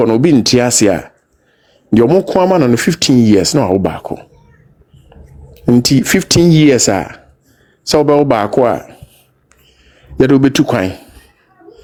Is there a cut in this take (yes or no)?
no